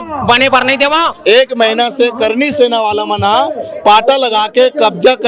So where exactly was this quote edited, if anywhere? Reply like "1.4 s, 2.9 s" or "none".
1.1 s